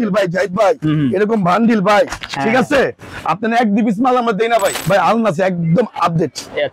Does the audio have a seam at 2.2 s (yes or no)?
yes